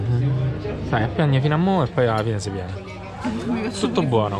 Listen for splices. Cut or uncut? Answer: uncut